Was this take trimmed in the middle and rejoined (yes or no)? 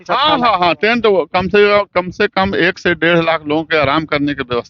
no